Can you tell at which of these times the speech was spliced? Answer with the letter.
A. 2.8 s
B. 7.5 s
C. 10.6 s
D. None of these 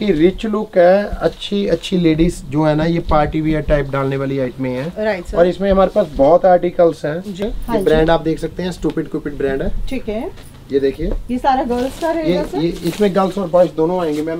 B